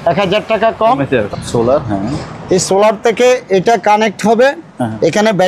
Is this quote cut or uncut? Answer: cut